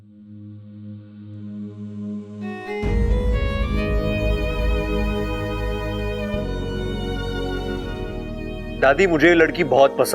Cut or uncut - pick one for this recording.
cut